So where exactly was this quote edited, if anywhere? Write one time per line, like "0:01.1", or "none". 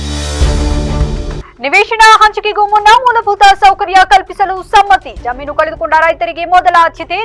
0:01.4